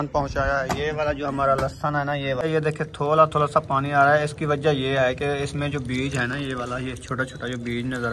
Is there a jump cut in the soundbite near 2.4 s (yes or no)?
yes